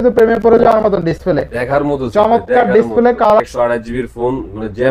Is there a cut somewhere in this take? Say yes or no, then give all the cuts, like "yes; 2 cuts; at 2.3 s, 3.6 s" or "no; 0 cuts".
yes; 1 cut; at 3.3 s